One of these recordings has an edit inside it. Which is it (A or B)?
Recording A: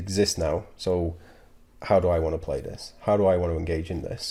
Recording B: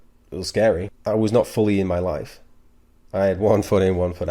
B